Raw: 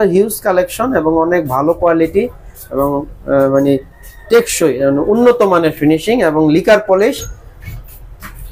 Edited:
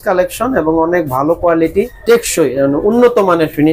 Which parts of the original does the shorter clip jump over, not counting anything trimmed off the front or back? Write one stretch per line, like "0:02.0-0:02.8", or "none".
0:02.3-0:04.2

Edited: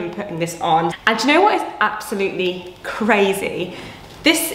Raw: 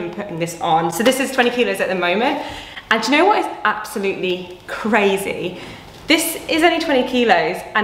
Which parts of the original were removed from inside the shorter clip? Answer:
0:00.9-0:02.8

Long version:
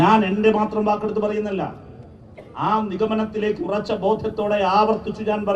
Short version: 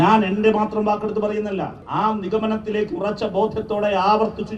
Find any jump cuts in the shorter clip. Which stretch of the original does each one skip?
0:01.8-0:02.5

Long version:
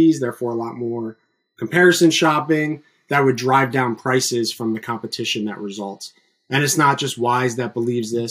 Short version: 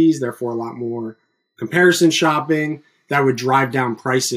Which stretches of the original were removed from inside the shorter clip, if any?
none

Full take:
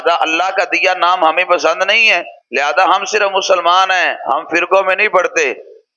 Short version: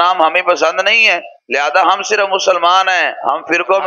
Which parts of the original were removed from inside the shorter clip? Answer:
none

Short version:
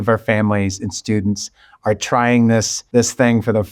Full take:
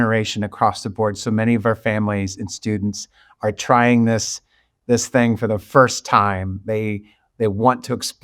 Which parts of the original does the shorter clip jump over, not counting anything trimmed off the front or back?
0:04.3-0:04.7

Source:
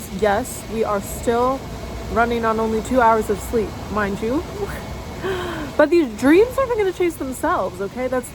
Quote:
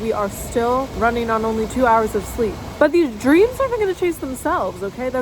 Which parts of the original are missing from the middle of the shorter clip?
0:01.6-0:02.1
0:03.8-0:05.6

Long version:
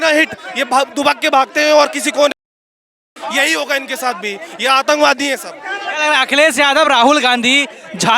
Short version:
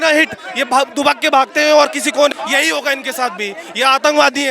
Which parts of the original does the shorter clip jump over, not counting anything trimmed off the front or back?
0:02.4-0:03.2

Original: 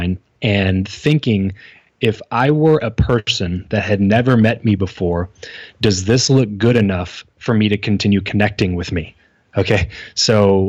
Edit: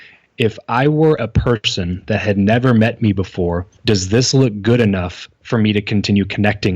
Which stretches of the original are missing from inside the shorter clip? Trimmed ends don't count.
0:05.3-0:05.6

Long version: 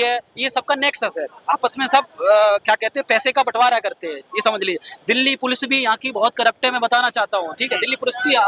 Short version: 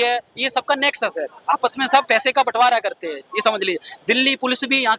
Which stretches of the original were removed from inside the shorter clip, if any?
0:02.1-0:03.1

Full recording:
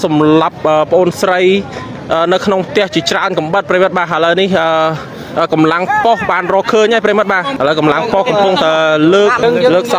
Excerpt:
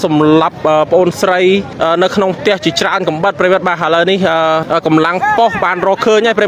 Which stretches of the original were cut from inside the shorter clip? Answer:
0:01.7-0:02.0
0:05.0-0:05.3

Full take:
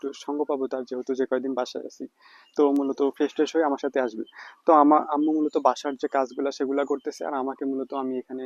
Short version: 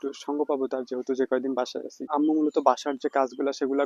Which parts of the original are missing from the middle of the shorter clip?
0:02.1-0:05.1

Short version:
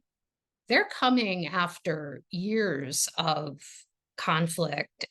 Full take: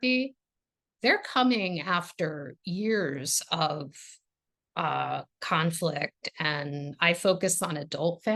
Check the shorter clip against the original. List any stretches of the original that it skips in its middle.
0:04.4-0:05.3

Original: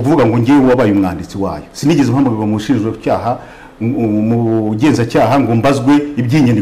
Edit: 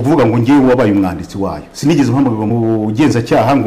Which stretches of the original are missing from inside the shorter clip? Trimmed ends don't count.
0:02.5-0:04.3

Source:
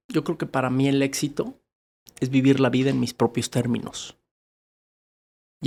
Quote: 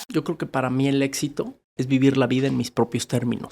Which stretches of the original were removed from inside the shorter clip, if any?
0:01.7-0:02.1

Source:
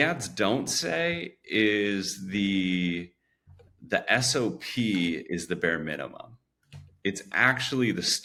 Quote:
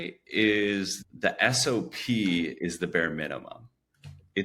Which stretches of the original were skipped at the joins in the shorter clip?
0:02.2-0:03.7

